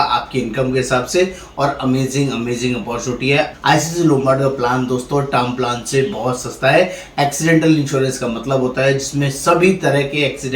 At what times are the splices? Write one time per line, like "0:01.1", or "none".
0:03.5